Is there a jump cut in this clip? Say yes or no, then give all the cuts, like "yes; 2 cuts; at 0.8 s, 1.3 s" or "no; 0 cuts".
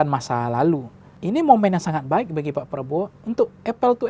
yes; 1 cut; at 1.0 s